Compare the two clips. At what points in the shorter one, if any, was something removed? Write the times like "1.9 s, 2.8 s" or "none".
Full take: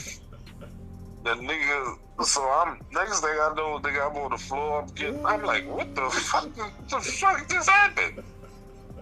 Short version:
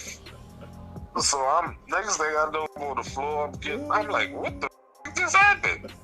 1.0 s, 2.8 s, 5.0 s